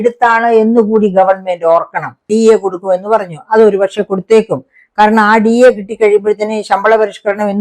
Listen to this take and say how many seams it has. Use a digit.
1